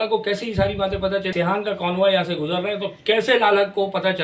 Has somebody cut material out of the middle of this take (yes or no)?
yes